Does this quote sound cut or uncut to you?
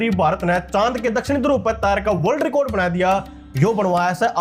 uncut